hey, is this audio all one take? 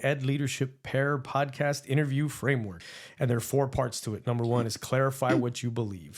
no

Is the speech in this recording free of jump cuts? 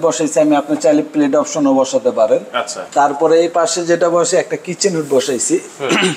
yes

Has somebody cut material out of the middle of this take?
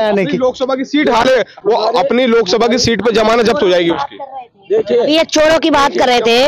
no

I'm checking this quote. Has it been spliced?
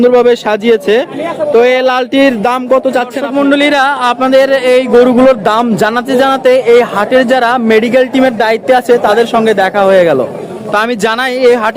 yes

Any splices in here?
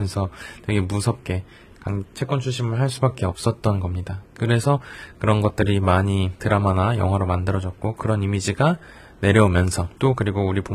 no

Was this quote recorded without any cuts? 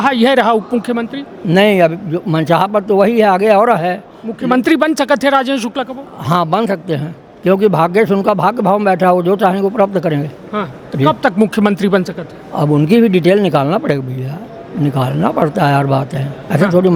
yes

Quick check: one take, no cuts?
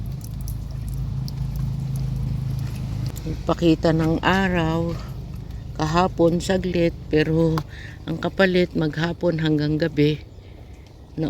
no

